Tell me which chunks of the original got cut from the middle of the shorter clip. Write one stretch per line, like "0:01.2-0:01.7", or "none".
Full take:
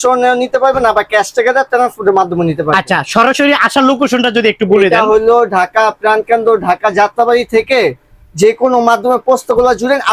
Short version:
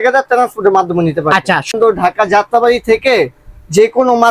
0:03.1-0:06.4